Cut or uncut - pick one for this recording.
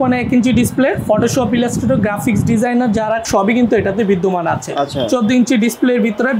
cut